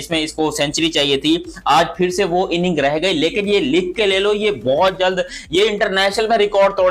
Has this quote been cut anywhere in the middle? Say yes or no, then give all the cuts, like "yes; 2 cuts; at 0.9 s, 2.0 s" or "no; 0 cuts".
no; 0 cuts